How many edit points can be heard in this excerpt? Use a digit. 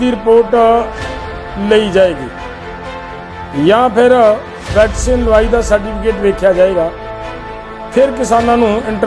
0